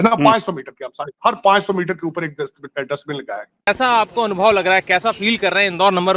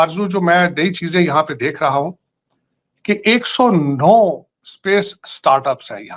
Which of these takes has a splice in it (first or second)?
first